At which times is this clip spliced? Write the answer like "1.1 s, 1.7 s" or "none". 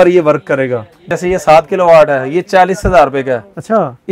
1.1 s